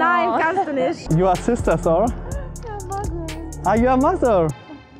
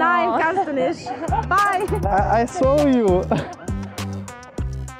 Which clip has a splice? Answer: first; 1 cut; at 1.0 s

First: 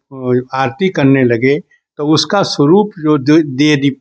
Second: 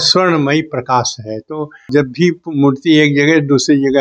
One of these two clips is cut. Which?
second; 1 cut; at 1.9 s

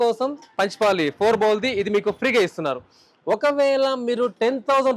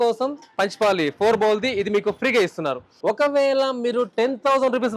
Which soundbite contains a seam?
second; 1 cut; at 2.9 s

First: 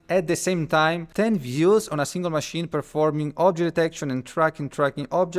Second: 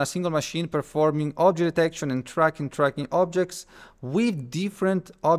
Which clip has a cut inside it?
first; 1 cut; at 1.0 s

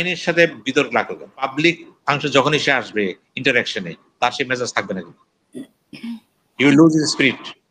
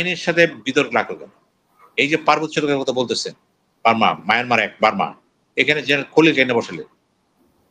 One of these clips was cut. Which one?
first; 1 cut; at 1.5 s

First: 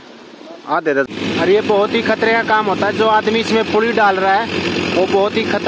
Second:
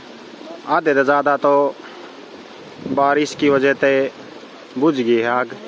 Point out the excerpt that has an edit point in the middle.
first; 1 cut; at 1.1 s

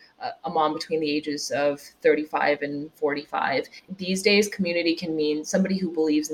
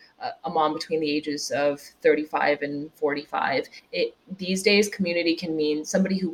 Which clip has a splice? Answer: first; 1 cut; at 3.8 s

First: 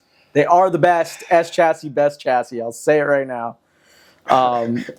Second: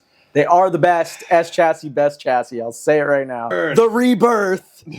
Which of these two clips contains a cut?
second; 1 cut; at 3.7 s

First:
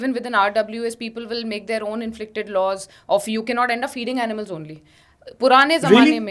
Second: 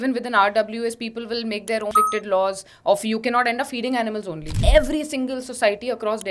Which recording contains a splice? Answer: second; 2 cuts; at 1.9 s, 4.6 s

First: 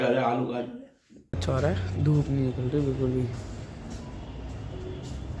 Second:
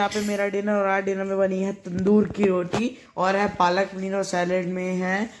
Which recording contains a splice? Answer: first; 1 cut; at 1.4 s

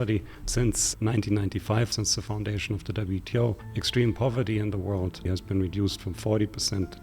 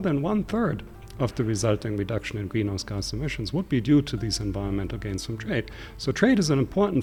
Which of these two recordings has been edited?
first; 4 cuts; at 0.8 s, 1.9 s, 3.7 s, 5.3 s

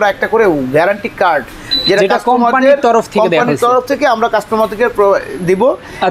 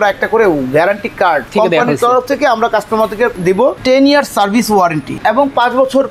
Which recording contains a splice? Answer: second; 3 cuts; at 1.5 s, 3.4 s, 5.2 s

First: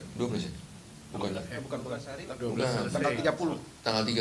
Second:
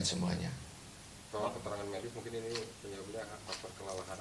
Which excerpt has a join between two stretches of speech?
second; 1 cut; at 3.3 s

